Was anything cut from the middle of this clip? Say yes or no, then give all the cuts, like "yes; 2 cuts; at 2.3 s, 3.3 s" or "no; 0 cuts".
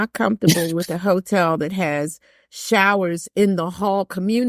no; 0 cuts